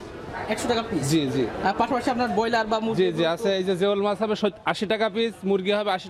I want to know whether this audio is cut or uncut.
uncut